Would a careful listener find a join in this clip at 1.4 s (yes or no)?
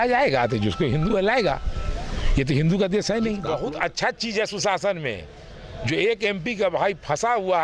no